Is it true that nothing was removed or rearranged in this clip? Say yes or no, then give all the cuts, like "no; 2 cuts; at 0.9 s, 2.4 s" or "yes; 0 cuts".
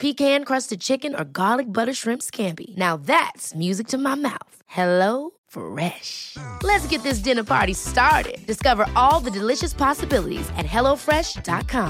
yes; 0 cuts